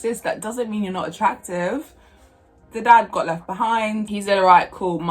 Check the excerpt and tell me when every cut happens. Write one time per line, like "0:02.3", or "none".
0:02.6
0:04.1